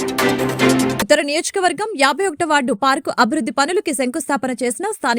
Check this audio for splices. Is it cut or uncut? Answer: uncut